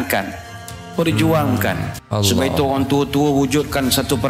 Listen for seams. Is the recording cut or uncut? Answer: cut